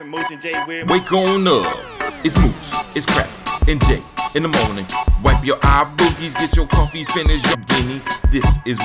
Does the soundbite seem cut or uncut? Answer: cut